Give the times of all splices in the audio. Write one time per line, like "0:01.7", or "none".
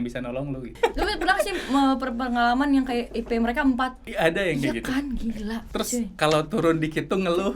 0:00.8
0:04.0
0:05.6